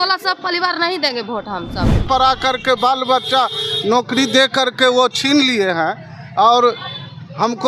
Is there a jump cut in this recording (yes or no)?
yes